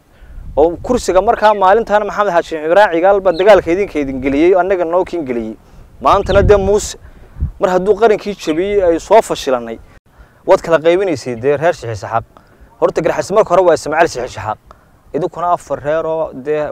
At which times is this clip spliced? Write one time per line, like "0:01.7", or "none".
0:10.1